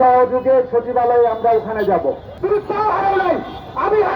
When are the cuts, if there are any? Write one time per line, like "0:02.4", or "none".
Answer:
0:02.3